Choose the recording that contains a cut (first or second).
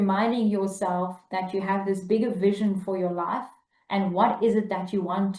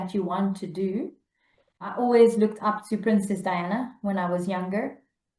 second